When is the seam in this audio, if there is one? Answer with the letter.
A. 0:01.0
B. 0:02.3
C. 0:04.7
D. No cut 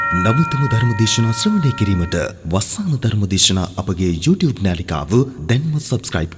D